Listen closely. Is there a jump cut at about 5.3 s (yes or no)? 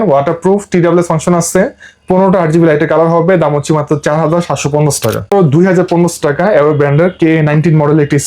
yes